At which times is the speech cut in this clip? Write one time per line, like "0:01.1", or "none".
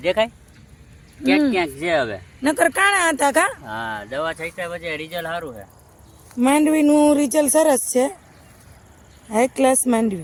none